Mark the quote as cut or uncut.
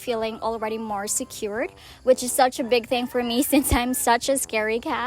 uncut